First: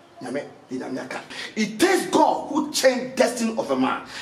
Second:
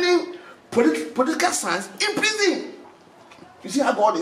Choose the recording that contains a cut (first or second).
first